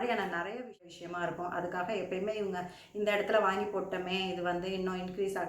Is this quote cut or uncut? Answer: cut